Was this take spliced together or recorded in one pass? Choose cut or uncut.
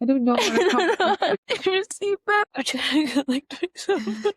cut